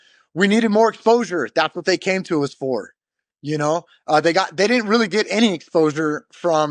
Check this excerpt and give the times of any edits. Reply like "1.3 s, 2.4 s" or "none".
none

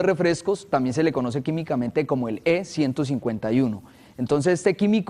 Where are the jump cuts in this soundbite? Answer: 3.1 s

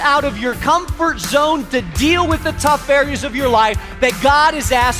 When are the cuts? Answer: none

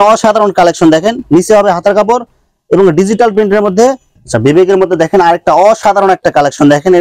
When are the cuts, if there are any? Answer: 4.1 s

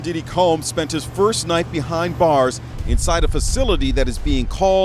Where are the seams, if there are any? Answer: none

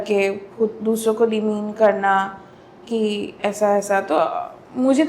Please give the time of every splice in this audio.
none

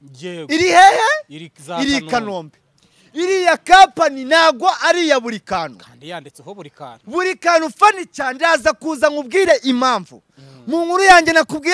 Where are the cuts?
none

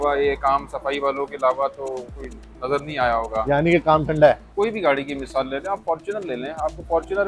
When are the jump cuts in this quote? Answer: 4.5 s

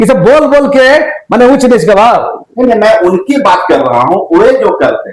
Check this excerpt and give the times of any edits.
none

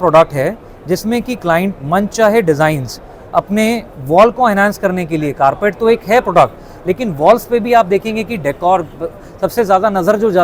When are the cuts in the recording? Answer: none

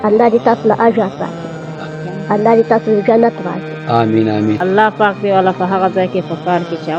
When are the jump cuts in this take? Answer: 4.6 s

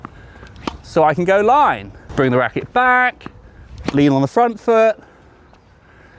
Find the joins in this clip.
1.9 s

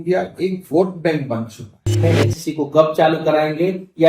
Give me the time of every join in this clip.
2.0 s

